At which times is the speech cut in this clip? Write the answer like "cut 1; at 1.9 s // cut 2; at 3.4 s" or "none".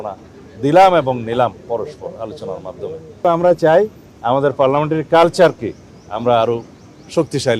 cut 1; at 3.2 s